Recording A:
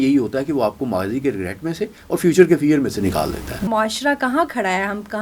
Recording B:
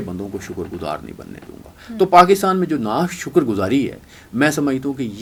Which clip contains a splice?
A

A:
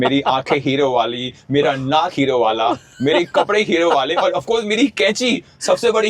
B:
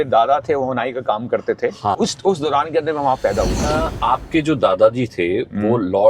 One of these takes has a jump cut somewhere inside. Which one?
B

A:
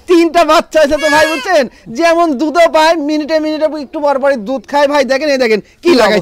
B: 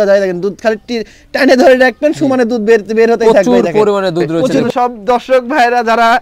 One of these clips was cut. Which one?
B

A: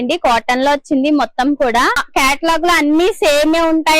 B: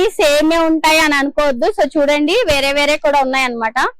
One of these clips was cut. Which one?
A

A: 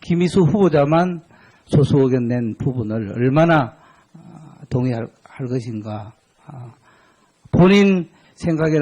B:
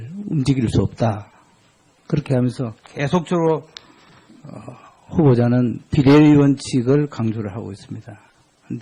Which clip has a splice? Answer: A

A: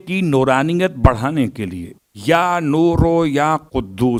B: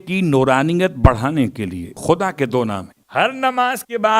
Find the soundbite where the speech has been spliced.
B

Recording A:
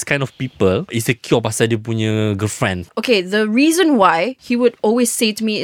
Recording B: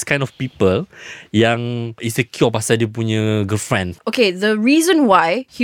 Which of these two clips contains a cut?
A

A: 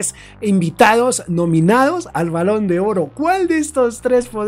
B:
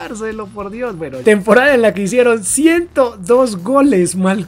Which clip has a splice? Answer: B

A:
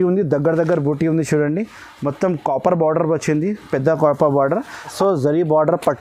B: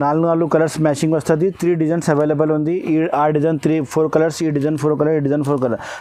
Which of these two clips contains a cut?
A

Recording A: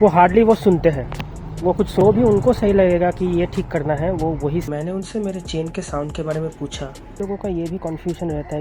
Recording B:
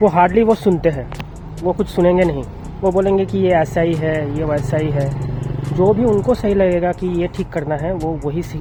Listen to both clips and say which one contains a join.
A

